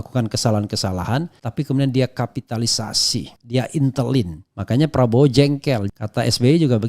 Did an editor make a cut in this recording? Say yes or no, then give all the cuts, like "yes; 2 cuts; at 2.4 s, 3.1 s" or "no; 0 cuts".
yes; 1 cut; at 5.8 s